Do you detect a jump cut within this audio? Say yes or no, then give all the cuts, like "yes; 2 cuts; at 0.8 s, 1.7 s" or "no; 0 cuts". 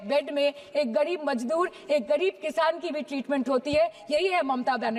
no; 0 cuts